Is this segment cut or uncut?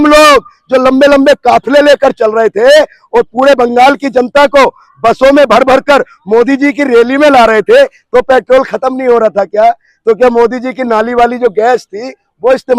uncut